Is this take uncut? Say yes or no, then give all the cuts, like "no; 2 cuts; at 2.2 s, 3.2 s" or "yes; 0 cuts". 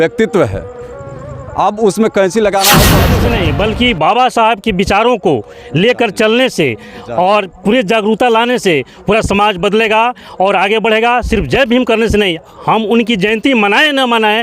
no; 1 cut; at 3.1 s